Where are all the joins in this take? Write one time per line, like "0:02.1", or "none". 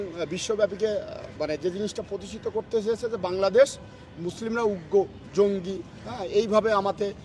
none